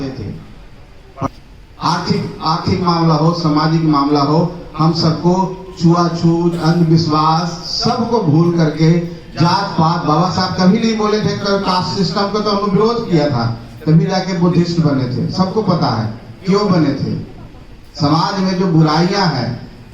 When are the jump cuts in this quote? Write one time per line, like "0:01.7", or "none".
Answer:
0:01.3

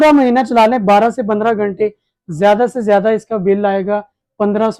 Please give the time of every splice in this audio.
none

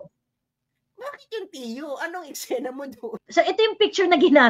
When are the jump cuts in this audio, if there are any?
0:03.2

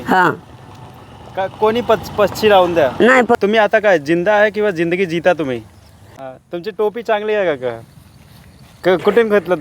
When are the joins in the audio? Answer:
0:03.4
0:06.2

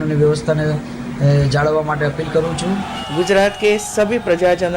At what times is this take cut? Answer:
0:03.0

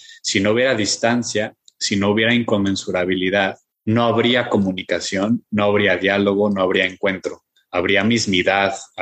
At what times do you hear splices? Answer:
0:03.7

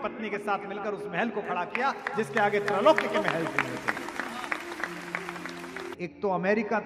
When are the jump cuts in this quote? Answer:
0:05.9

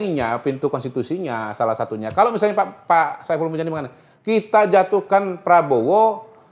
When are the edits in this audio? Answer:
none

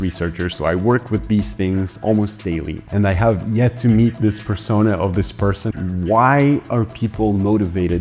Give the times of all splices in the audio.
0:02.8
0:05.7

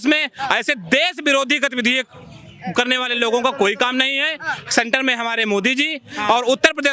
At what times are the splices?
none

